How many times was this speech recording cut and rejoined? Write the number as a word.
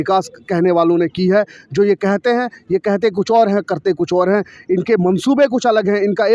zero